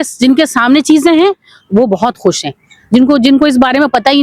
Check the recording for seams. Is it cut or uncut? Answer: uncut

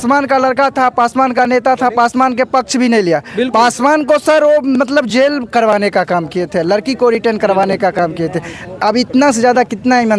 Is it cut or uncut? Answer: uncut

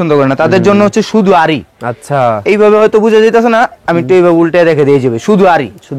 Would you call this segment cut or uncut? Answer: uncut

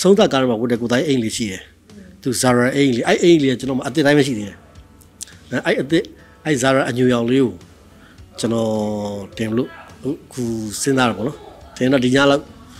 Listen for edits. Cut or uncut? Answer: uncut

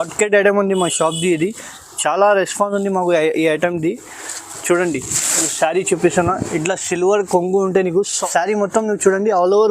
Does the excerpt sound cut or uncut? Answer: cut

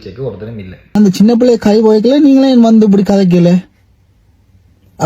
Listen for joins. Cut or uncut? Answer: cut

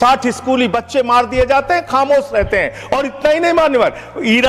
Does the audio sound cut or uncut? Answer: uncut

